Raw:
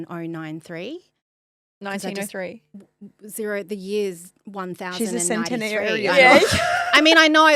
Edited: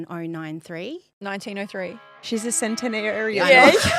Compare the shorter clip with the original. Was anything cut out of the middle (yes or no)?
yes